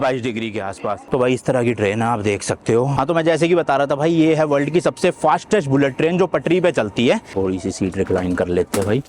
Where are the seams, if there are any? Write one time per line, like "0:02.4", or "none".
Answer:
0:01.0
0:02.9
0:07.3